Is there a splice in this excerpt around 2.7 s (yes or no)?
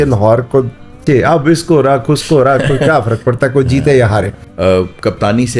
no